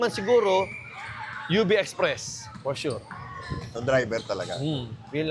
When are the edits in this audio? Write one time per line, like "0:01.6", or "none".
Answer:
none